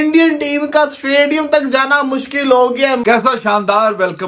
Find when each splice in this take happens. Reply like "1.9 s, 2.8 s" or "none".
3.0 s